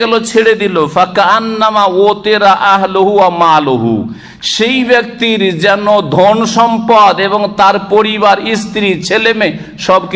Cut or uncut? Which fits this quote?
uncut